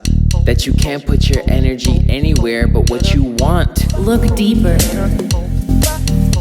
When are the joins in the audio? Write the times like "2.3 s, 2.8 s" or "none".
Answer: 3.9 s